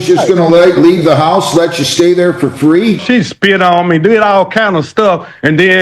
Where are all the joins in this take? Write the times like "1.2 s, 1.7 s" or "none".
3.0 s